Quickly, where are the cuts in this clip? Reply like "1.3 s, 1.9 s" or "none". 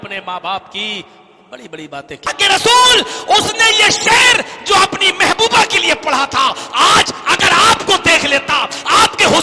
2.3 s